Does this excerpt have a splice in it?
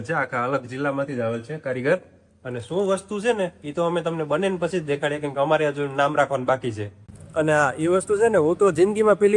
no; 0 cuts

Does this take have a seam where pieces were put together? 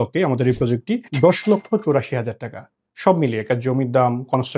yes; 1 cut; at 1.0 s

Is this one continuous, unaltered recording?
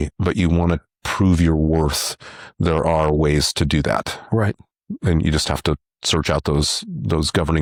yes; 0 cuts

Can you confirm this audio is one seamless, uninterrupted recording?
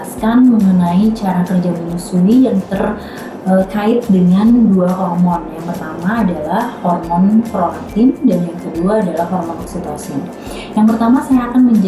yes; 0 cuts

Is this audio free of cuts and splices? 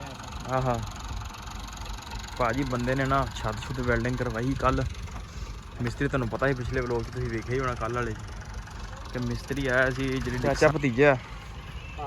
no; 1 cut; at 10.4 s

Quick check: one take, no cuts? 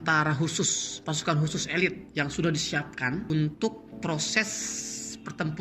no; 3 cuts; at 2.0 s, 3.3 s, 3.9 s

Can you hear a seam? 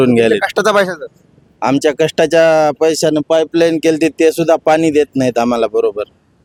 no; 0 cuts

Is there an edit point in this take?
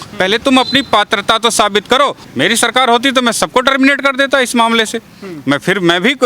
yes; 1 cut; at 2.2 s

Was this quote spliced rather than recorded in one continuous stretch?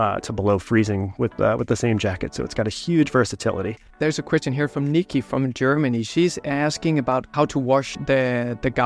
yes; 2 cuts; at 4.0 s, 7.9 s

